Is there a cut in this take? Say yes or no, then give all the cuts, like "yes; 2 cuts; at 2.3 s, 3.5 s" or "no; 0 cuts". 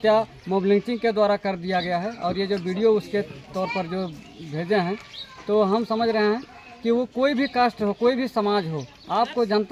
no; 0 cuts